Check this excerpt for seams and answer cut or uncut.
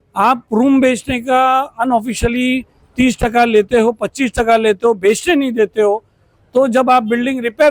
uncut